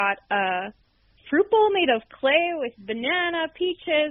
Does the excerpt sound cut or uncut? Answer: uncut